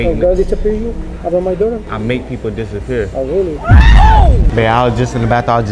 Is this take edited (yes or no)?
yes